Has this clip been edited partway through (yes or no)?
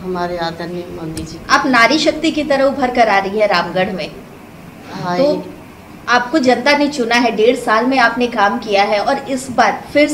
no